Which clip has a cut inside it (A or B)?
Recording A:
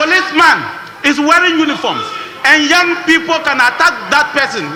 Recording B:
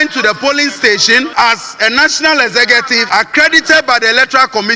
B